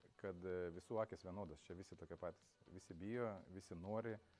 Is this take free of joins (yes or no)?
yes